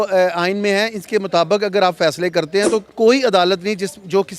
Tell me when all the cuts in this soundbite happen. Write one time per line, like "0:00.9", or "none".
0:02.9